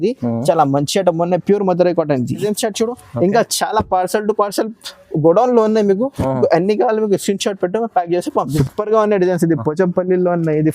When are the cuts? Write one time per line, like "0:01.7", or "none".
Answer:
0:02.5
0:08.6